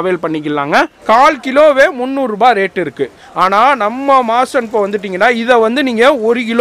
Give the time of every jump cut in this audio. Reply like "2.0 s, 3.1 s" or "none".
1.0 s